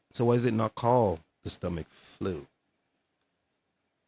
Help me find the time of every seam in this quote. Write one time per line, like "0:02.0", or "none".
none